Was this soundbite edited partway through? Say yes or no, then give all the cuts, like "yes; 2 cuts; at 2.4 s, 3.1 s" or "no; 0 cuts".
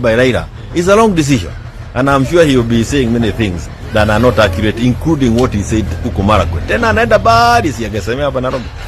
no; 0 cuts